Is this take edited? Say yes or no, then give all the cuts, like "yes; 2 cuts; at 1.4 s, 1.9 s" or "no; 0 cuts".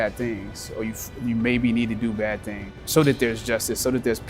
yes; 1 cut; at 2.8 s